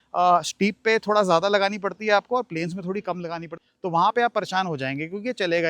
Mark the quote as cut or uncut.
cut